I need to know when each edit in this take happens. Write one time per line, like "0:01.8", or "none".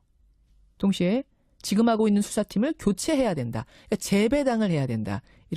0:02.8